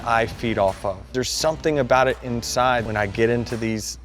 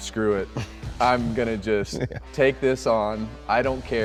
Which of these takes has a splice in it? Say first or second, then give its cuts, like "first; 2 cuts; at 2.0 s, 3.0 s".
first; 2 cuts; at 1.1 s, 2.9 s